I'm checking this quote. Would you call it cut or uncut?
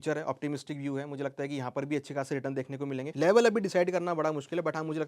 cut